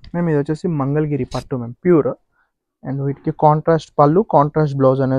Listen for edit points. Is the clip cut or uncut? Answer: uncut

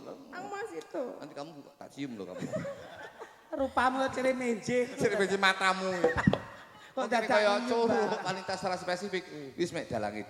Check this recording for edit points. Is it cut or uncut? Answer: cut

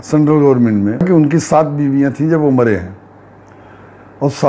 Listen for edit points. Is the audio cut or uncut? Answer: cut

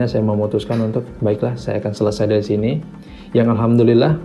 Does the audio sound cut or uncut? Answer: uncut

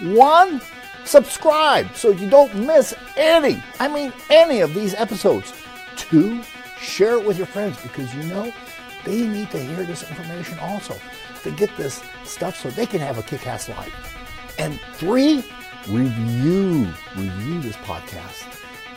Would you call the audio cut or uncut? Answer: uncut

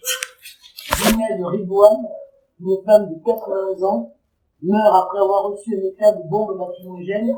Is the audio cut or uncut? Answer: uncut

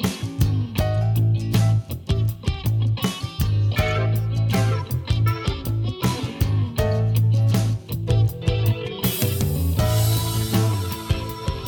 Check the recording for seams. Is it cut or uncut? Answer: uncut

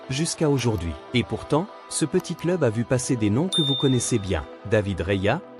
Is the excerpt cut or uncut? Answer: cut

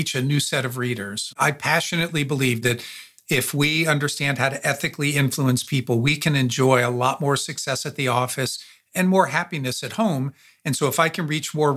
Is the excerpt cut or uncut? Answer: cut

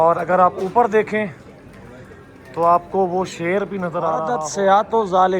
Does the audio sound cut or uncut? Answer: cut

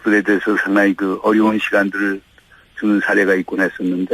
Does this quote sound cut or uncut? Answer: uncut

